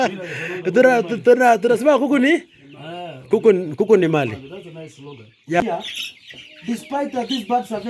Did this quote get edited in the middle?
yes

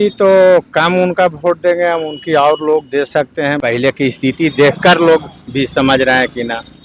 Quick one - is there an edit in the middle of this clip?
yes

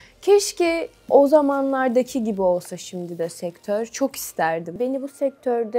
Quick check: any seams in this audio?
yes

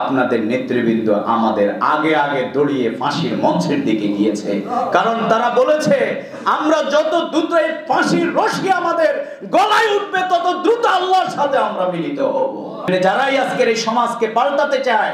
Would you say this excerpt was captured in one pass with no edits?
no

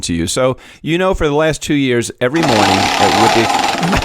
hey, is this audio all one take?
no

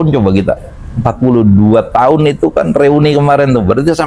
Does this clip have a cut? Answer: no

